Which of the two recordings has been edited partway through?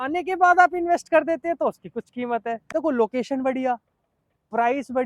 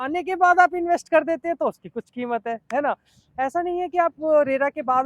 first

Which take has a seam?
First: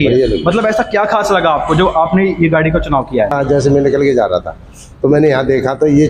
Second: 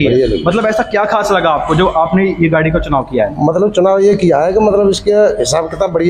first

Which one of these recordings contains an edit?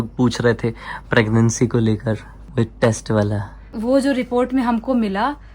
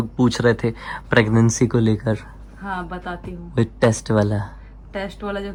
first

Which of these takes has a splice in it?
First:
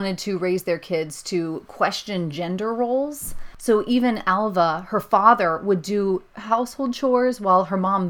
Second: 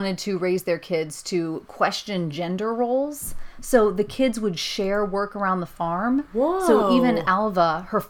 first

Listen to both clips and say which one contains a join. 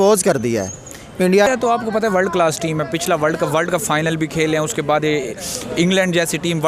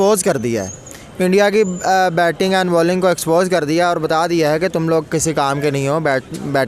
first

